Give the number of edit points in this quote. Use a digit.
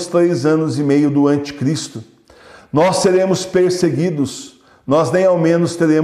0